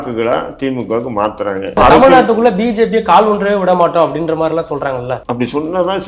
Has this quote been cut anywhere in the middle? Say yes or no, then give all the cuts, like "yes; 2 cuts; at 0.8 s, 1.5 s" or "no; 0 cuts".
yes; 2 cuts; at 1.8 s, 5.2 s